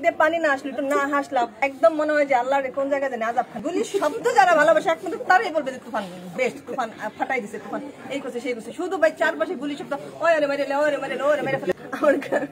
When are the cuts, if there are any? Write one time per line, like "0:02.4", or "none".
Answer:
0:01.6
0:03.5
0:11.7